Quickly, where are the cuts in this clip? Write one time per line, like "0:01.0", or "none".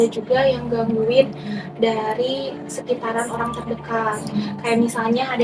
none